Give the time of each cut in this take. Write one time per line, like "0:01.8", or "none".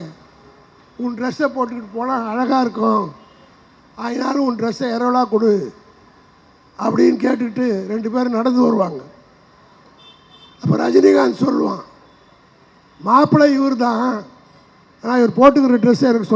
none